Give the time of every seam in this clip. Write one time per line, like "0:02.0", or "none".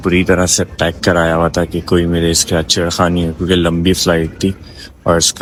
none